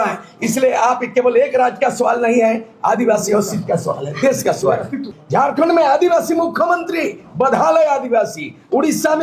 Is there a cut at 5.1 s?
yes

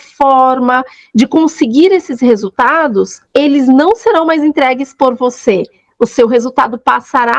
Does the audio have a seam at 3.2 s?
yes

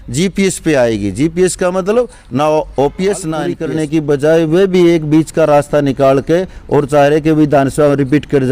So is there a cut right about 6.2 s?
no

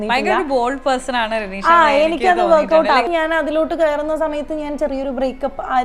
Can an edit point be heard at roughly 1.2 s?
no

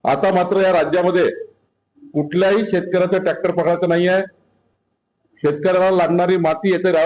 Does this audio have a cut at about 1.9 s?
no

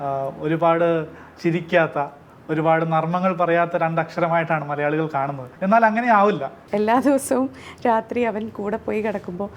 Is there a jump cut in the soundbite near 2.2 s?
no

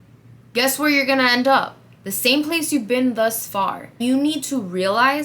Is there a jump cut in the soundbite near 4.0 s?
yes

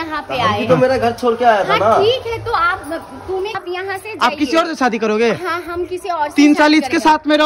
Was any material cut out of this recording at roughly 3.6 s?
yes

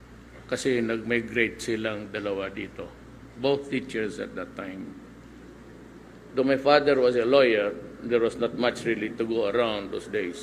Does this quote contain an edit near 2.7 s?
no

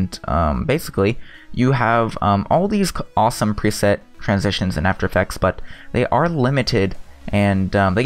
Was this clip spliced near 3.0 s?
no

